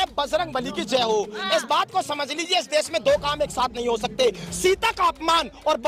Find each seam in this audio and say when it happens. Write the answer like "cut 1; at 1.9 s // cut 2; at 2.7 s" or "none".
none

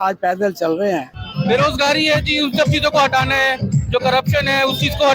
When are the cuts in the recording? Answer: cut 1; at 1.2 s

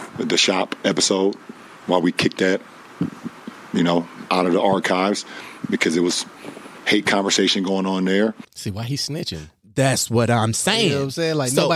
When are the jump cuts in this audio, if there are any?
none

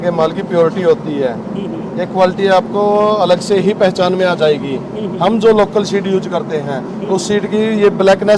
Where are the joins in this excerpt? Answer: none

